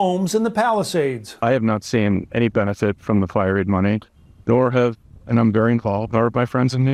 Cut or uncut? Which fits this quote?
uncut